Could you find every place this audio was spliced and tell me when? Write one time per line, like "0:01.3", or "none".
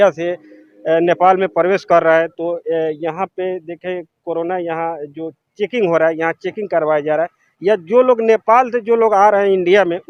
none

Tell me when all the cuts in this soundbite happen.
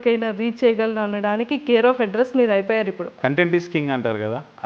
0:03.2

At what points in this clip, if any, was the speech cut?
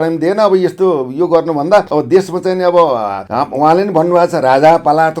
0:01.9
0:03.2

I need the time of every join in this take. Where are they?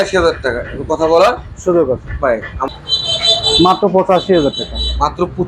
0:02.7

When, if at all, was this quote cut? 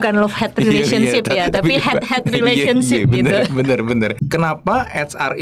0:04.2

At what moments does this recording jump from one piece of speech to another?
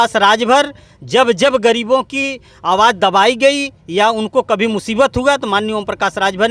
none

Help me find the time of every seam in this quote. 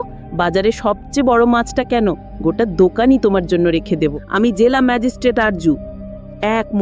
0:04.2

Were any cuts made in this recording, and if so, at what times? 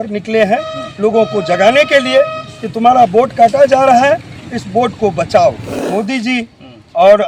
0:05.7

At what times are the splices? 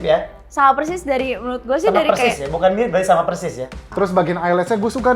0:03.8

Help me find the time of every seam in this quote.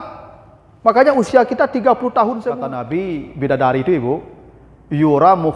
0:02.8

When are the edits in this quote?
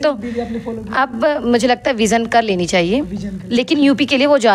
none

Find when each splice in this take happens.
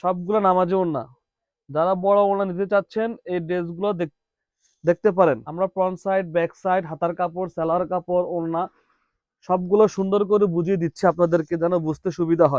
0:05.5

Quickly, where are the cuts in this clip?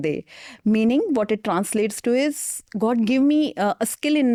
none

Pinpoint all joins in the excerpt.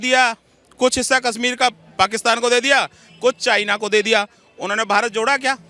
none

